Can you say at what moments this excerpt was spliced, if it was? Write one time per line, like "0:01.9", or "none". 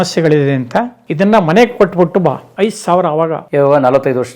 0:01.0
0:02.5
0:03.4